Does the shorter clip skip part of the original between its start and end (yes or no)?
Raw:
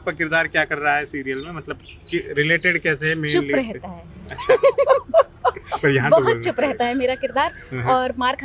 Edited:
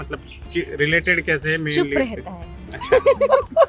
no